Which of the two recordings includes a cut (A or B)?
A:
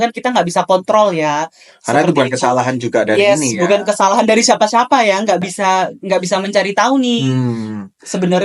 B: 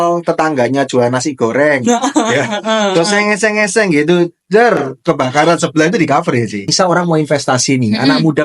B